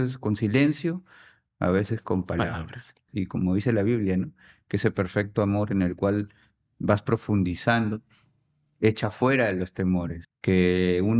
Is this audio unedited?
no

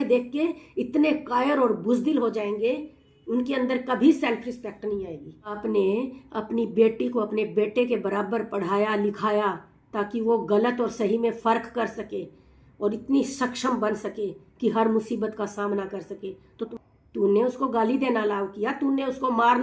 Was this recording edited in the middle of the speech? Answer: yes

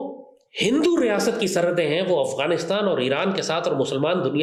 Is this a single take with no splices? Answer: yes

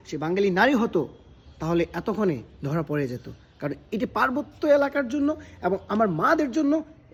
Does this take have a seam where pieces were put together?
no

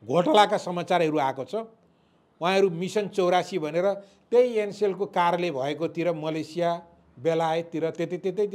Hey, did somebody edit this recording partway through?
no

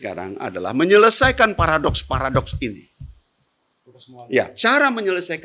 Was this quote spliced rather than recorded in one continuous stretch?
no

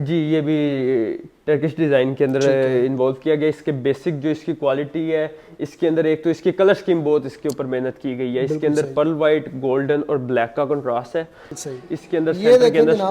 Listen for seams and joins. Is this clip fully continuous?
no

